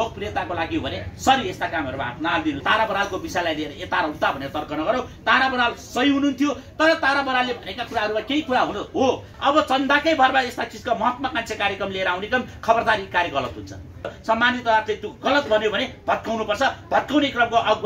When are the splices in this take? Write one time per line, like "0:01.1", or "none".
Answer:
0:02.6
0:09.3
0:14.1